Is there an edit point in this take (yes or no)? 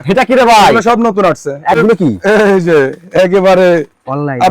yes